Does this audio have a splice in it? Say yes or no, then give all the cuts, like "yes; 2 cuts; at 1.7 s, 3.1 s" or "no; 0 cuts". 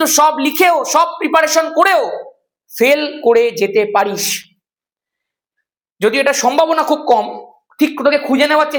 no; 0 cuts